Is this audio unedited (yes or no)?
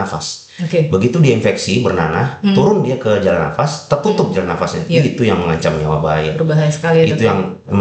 yes